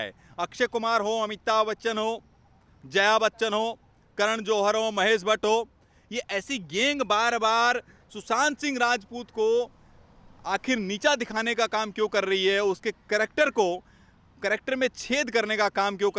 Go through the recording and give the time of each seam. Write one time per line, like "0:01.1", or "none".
none